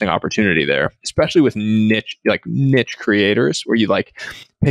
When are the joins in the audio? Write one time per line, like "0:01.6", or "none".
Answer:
none